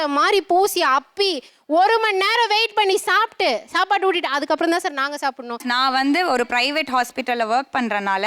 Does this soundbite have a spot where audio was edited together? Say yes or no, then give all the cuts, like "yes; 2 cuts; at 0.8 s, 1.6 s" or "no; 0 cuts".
yes; 1 cut; at 5.6 s